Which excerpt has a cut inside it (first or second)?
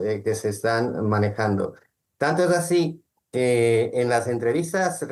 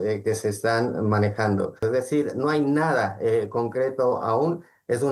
second